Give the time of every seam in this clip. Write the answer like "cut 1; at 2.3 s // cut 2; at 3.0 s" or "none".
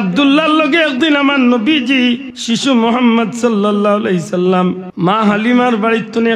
cut 1; at 2.3 s // cut 2; at 4.9 s